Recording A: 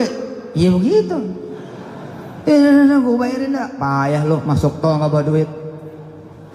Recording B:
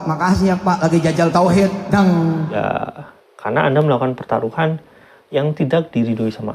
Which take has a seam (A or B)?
B